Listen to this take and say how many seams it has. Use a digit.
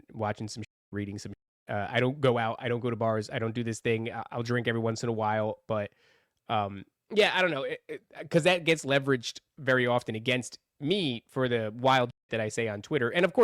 0